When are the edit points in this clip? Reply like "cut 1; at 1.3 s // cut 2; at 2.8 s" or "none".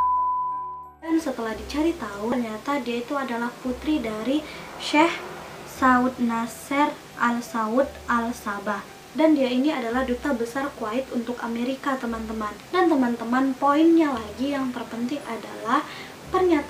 cut 1; at 1.1 s